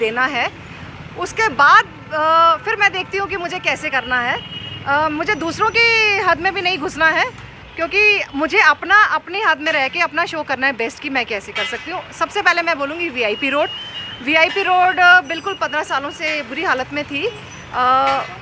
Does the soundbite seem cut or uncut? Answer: uncut